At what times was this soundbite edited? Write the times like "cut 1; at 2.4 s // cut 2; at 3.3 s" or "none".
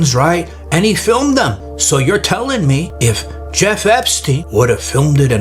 cut 1; at 1.7 s // cut 2; at 2.9 s // cut 3; at 4.4 s